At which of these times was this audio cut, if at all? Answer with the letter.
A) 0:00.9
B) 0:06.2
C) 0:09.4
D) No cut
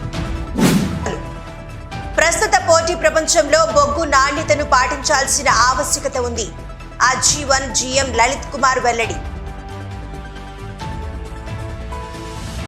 A